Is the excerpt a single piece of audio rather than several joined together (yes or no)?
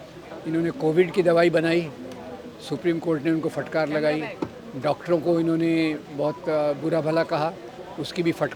yes